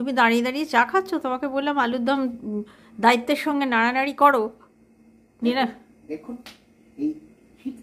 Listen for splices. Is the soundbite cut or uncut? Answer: uncut